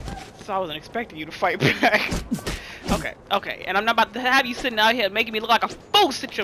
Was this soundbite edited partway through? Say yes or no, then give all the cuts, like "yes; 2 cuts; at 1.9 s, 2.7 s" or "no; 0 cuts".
no; 0 cuts